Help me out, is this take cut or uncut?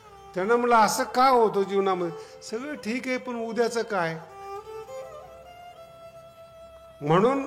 cut